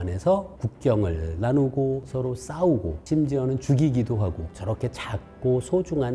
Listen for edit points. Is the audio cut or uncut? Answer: cut